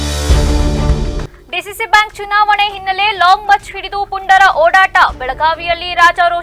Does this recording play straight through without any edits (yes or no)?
no